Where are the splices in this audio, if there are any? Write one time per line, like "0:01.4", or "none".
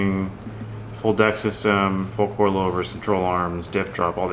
none